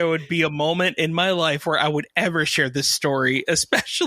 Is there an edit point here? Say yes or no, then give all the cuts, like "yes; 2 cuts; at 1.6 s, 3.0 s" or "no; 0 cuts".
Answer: no; 0 cuts